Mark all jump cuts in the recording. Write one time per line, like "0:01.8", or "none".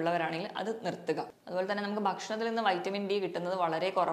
0:01.4

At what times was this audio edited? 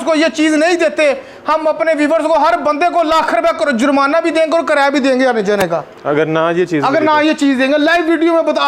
none

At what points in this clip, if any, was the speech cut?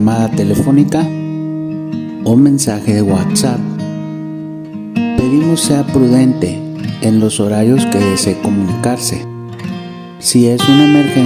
none

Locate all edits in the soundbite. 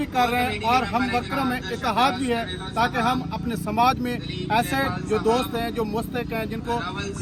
none

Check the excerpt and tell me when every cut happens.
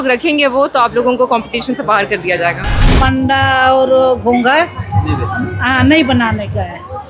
0:03.0

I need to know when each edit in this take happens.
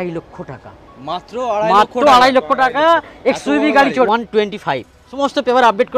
0:04.1
0:05.1

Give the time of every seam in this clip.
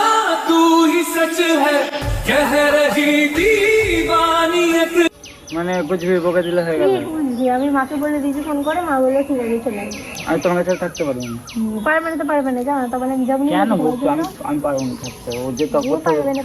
none

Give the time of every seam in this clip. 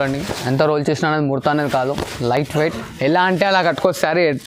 none

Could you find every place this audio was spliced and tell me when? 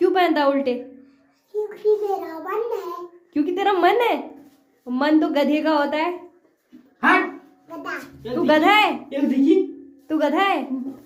none

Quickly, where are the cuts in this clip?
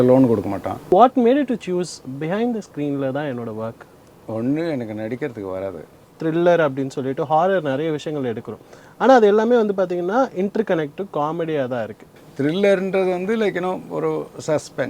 0:00.9
0:06.1
0:12.2

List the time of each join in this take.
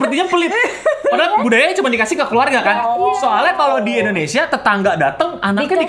none

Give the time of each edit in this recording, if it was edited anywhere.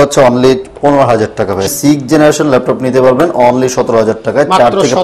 0:01.7

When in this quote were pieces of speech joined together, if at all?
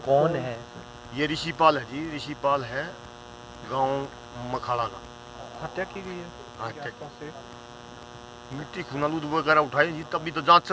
0:07.0

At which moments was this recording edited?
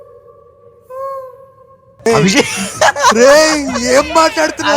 0:02.1

